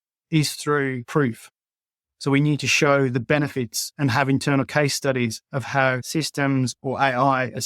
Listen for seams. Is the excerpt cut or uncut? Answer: cut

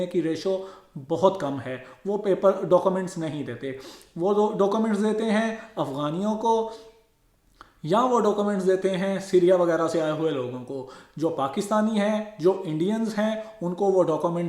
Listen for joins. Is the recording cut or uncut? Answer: uncut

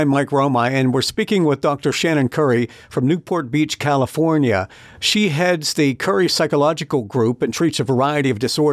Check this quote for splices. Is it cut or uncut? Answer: uncut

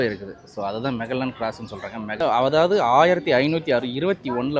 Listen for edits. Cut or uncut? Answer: cut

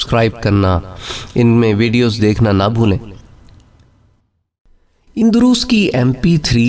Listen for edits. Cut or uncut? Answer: cut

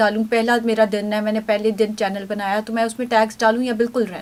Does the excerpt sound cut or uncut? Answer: uncut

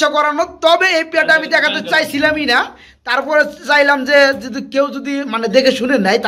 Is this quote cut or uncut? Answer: uncut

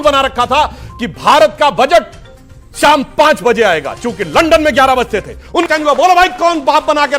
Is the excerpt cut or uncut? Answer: cut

